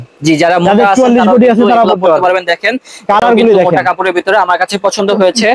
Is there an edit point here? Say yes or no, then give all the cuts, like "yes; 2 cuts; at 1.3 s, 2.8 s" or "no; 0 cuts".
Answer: no; 0 cuts